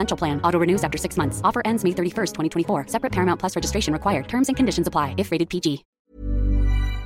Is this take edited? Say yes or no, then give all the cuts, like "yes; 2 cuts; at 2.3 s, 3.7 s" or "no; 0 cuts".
yes; 1 cut; at 5.9 s